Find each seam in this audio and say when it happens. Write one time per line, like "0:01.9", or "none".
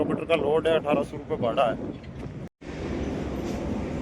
0:02.5